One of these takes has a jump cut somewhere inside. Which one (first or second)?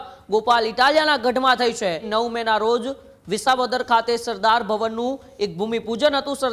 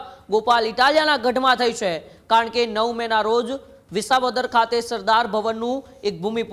first